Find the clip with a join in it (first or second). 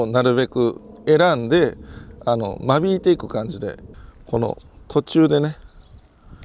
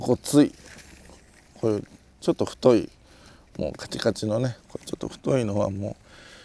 first